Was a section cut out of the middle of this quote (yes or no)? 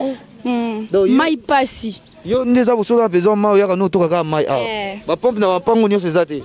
no